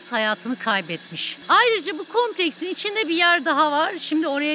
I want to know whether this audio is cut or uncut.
uncut